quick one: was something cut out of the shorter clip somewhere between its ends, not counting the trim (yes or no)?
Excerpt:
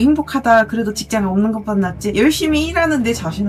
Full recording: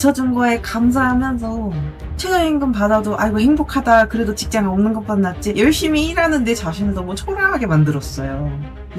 no